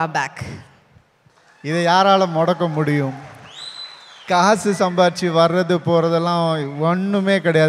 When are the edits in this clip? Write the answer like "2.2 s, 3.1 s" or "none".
0.9 s